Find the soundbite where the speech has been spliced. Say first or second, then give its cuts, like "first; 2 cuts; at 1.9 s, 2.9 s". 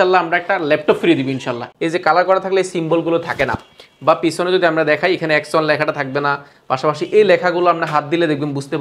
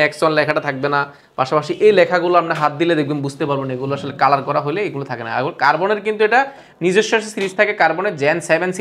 first; 1 cut; at 1.7 s